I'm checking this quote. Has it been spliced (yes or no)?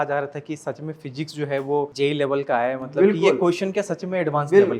yes